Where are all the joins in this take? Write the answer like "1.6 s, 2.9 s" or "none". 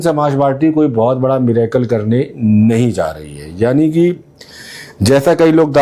none